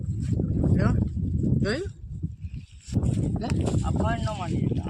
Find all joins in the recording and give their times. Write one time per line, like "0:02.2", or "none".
0:02.9